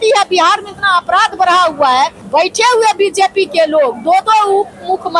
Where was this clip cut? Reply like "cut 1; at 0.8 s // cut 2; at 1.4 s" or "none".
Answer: cut 1; at 2.2 s